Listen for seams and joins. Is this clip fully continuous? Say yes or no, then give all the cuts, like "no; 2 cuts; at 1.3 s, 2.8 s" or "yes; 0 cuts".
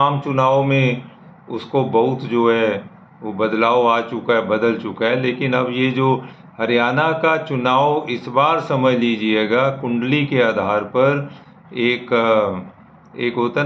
yes; 0 cuts